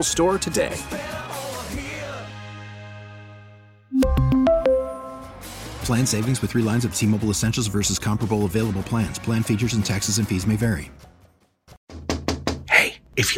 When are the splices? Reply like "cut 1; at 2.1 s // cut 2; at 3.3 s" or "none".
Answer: cut 1; at 11.9 s